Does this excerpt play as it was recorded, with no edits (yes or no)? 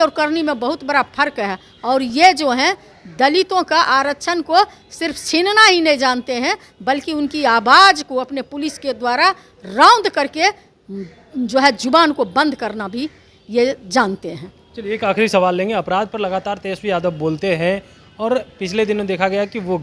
yes